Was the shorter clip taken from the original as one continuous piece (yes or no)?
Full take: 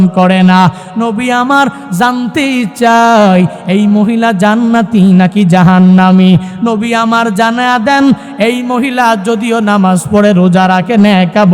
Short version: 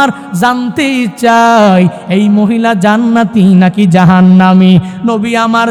yes